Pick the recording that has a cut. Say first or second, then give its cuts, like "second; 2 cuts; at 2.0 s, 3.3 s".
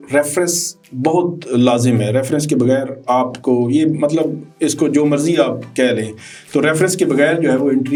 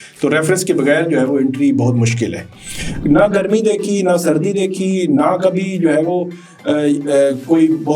second; 1 cut; at 2.8 s